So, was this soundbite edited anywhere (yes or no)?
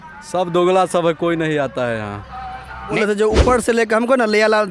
yes